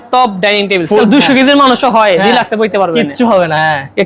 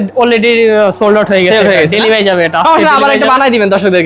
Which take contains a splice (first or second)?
first